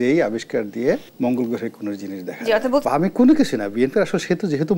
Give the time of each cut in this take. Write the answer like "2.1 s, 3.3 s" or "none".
1.1 s, 2.8 s